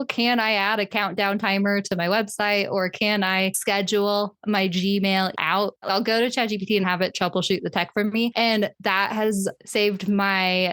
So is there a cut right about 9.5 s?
no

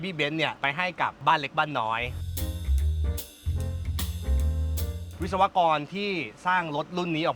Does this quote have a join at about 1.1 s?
yes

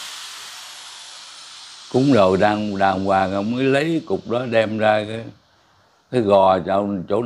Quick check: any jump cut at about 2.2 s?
no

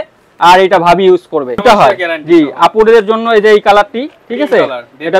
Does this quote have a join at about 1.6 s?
yes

